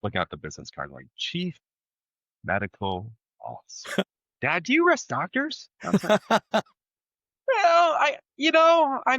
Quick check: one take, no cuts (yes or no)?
no